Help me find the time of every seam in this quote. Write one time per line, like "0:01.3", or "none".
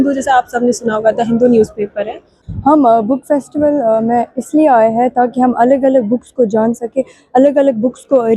0:02.4